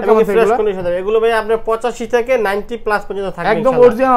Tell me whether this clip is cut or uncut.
uncut